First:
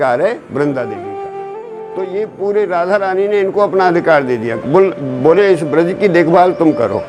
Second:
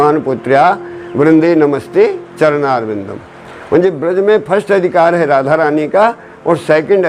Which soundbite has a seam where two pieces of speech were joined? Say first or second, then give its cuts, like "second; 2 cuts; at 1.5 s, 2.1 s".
first; 1 cut; at 1.6 s